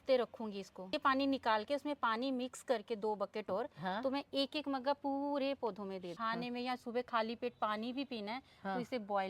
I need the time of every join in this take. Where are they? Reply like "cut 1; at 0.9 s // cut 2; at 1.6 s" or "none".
cut 1; at 0.9 s // cut 2; at 6.1 s